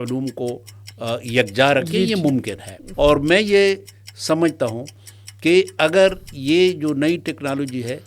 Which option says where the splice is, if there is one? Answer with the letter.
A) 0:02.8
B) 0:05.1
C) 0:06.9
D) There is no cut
A